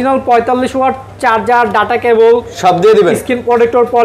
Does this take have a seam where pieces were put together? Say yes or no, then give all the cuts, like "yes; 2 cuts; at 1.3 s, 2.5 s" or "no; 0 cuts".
no; 0 cuts